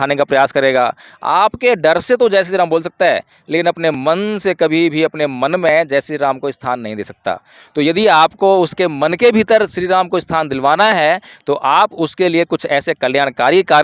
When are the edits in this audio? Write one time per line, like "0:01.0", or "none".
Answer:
none